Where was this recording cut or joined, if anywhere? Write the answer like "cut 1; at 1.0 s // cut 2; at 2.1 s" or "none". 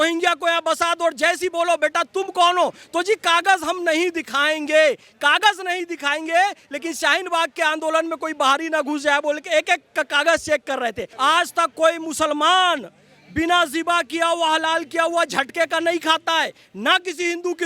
cut 1; at 11.1 s